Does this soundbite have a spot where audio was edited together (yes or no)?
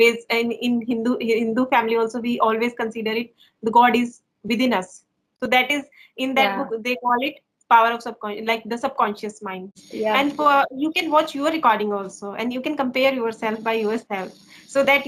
yes